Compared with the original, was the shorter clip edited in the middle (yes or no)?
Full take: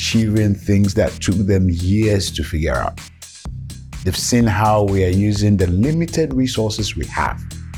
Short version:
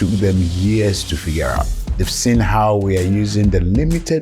yes